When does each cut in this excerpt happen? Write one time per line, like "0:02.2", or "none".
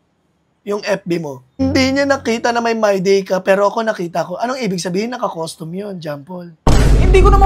0:01.6